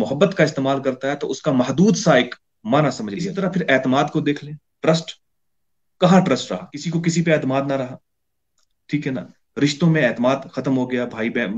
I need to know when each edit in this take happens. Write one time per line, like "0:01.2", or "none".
0:03.3
0:06.8